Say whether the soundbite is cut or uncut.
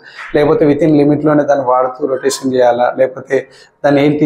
uncut